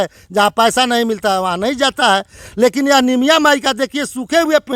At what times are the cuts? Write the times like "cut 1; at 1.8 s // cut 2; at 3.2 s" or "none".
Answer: none

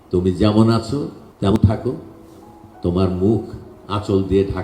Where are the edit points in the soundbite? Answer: cut 1; at 1.5 s

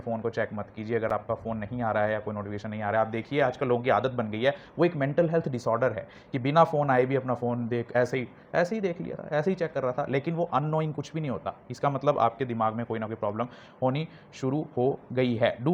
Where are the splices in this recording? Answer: none

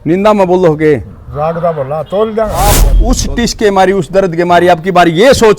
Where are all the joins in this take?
cut 1; at 2.9 s

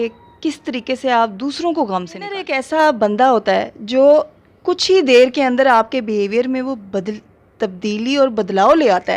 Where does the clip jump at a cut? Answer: cut 1; at 2.6 s

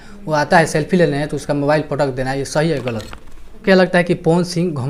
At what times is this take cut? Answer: cut 1; at 3.6 s

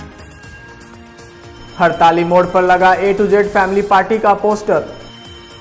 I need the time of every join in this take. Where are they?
cut 1; at 1.2 s

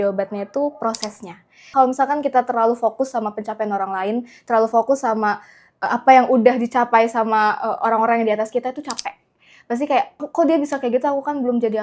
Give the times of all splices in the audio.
cut 1; at 1.6 s // cut 2; at 10.2 s

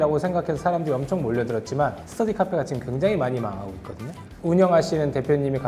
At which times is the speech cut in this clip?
none

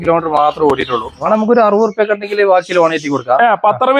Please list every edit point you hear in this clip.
cut 1; at 1.3 s

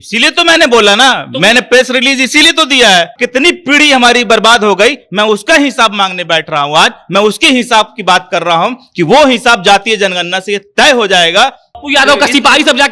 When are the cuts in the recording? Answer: cut 1; at 3.1 s // cut 2; at 11.7 s

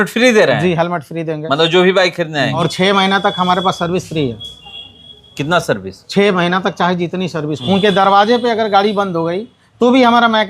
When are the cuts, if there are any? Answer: cut 1; at 2.6 s // cut 2; at 7.5 s

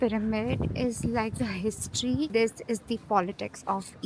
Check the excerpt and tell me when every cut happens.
cut 1; at 2.3 s

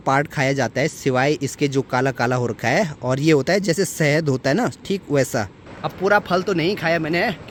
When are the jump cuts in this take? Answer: none

